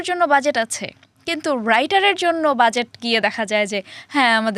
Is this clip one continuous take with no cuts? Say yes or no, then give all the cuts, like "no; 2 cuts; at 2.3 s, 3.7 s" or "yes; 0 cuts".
yes; 0 cuts